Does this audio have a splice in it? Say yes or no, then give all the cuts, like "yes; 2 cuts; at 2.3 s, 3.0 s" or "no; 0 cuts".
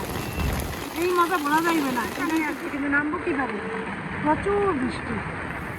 yes; 1 cut; at 2.3 s